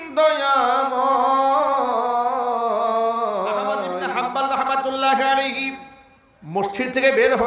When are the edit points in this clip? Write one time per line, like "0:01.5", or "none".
0:04.0